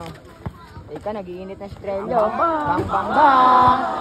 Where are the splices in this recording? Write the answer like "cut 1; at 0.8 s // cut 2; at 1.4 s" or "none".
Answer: none